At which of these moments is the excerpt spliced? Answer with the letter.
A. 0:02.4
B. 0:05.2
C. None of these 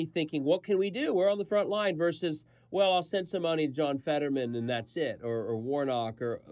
C